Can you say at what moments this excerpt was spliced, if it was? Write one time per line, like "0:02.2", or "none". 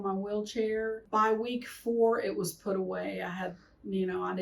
0:01.0